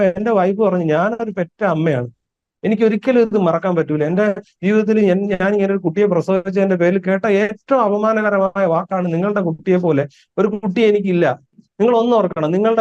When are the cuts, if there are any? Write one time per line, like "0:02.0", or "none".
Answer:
0:11.7